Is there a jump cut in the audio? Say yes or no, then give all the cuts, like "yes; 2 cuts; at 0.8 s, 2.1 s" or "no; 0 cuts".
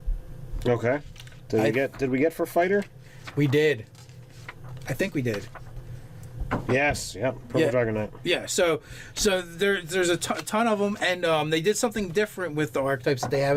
no; 0 cuts